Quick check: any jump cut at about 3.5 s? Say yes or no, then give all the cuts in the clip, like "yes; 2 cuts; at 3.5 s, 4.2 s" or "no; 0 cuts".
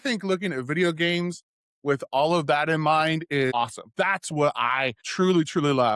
yes; 2 cuts; at 3.5 s, 5.0 s